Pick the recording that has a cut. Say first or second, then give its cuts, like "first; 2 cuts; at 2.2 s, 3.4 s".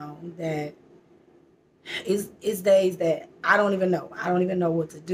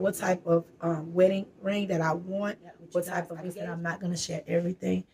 second; 1 cut; at 3.4 s